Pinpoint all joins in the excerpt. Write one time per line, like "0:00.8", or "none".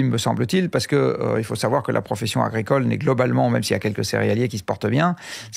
none